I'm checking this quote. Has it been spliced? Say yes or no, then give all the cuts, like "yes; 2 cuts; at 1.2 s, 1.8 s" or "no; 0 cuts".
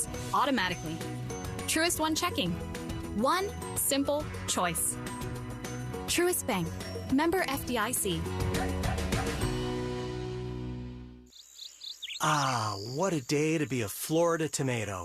yes; 1 cut; at 11.1 s